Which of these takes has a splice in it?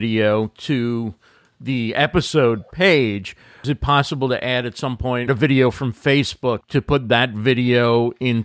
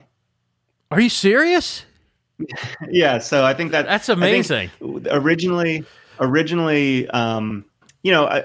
first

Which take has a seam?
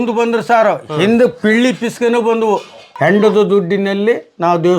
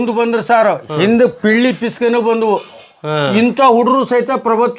first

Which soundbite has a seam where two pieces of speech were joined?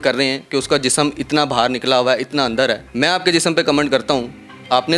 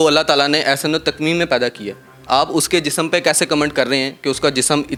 first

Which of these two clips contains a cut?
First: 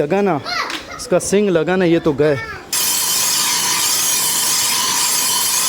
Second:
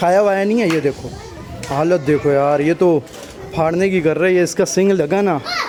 first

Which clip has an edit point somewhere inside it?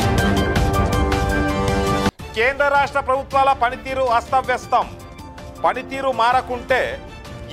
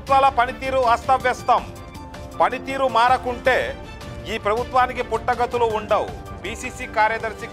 first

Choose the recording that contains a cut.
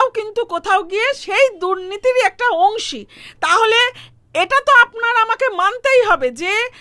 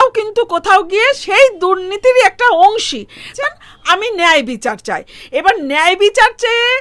second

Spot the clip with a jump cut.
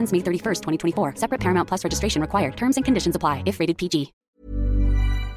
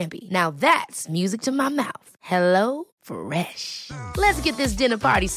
first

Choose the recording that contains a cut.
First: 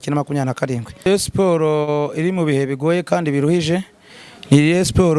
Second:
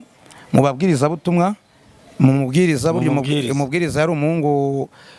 first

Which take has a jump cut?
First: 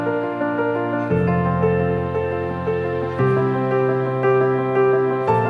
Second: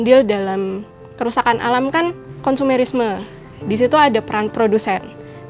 second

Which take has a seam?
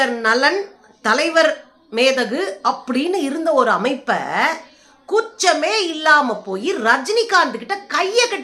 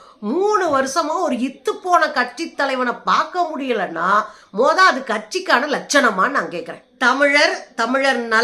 second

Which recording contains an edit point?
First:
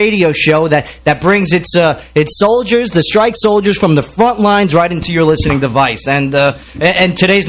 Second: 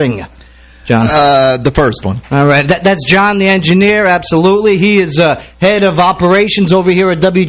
second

